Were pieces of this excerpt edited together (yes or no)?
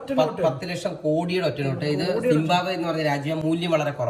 no